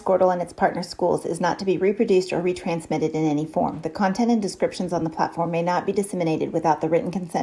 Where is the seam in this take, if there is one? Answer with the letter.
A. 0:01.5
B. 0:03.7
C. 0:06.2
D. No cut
B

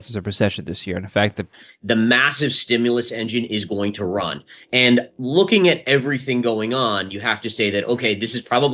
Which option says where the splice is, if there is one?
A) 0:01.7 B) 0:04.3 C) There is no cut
A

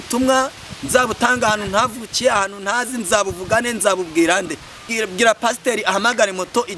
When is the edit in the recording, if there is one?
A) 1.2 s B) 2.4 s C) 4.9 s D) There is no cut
C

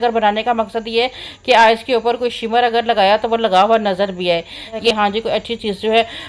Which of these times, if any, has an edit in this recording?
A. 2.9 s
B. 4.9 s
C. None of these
B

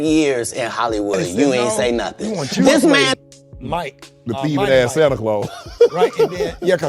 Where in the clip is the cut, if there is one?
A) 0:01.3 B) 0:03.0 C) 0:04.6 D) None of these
B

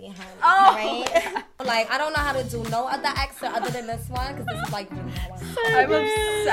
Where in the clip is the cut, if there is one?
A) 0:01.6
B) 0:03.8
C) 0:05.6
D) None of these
A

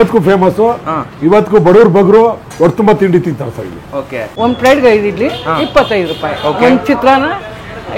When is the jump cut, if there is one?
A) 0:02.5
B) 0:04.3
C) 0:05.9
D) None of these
B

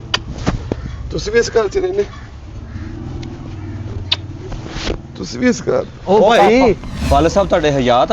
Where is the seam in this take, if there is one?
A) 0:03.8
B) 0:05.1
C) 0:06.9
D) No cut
C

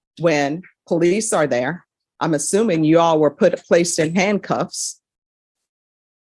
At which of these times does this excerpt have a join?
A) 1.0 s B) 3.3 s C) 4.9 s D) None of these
D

